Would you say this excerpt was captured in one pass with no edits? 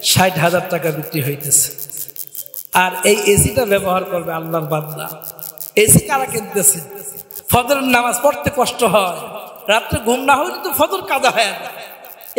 yes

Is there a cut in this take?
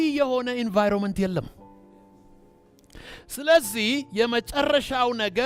no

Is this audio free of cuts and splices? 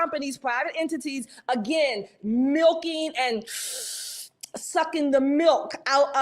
yes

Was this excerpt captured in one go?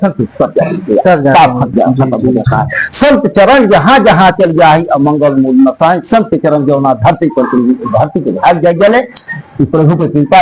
yes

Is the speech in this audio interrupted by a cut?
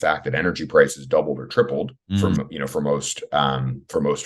yes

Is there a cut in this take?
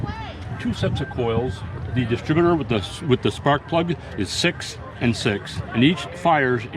yes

